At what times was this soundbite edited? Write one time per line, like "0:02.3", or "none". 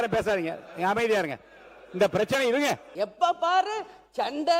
0:02.9